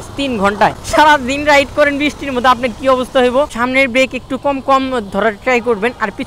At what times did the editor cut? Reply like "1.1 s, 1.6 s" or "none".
0.8 s, 3.5 s